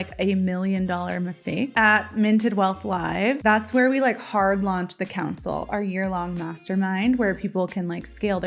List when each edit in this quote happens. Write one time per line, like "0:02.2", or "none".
0:01.7

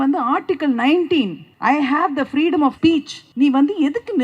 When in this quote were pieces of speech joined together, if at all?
0:01.4
0:02.8

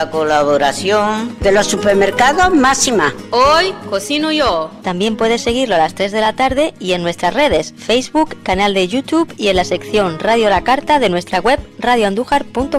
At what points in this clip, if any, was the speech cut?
none

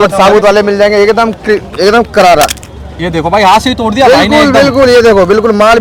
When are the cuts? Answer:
none

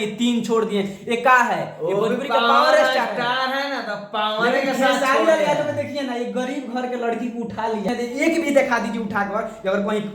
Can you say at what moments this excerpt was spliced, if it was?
0:07.9

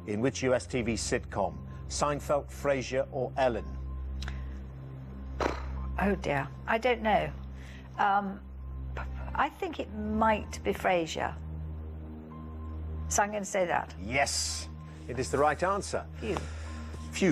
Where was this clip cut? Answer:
0:03.1

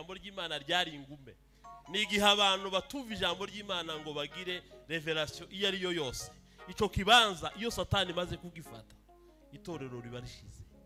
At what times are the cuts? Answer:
none

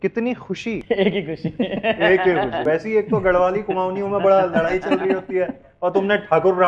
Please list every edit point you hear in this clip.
0:00.8
0:02.6

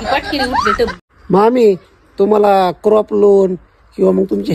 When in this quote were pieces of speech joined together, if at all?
0:01.1

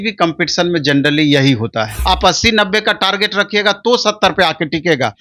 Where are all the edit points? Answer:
0:01.9

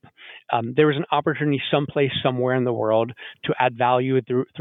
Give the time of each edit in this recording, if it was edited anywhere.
none

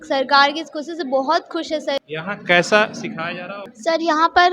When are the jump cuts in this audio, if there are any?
0:02.0
0:03.6

